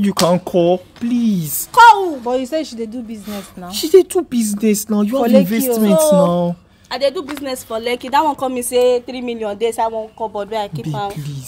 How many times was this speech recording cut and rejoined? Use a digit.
0